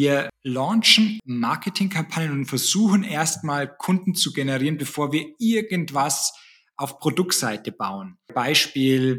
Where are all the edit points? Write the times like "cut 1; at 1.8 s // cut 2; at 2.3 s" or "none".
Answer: cut 1; at 1.2 s